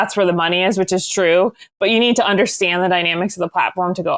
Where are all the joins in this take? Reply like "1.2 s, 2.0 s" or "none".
1.7 s